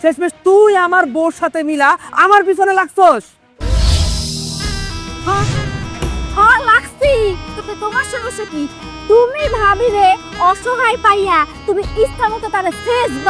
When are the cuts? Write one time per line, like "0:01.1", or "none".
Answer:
none